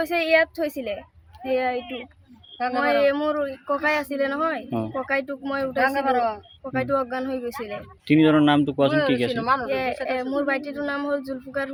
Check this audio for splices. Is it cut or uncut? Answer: uncut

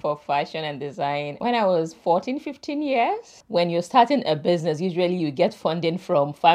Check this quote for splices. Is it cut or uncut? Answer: cut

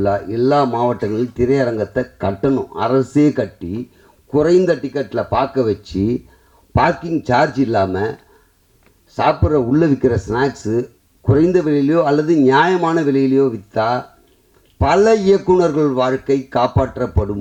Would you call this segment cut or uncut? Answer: uncut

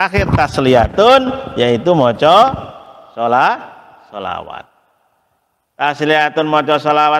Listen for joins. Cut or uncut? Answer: uncut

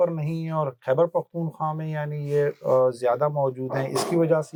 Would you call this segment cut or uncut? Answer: uncut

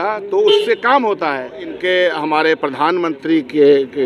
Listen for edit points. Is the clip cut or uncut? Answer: cut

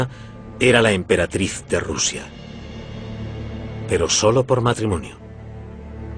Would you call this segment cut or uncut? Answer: cut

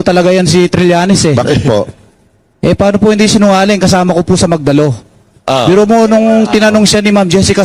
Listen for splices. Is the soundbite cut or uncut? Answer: uncut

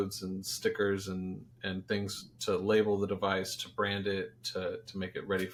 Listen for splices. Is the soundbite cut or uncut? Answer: uncut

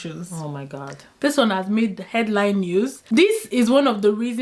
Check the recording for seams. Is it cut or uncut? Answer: cut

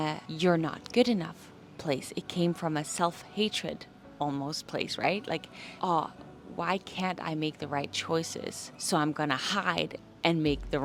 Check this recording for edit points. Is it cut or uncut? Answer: uncut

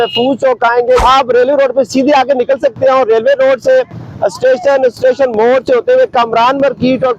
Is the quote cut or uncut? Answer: cut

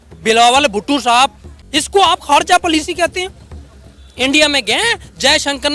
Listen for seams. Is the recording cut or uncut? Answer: cut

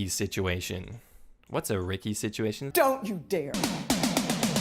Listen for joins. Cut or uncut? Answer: cut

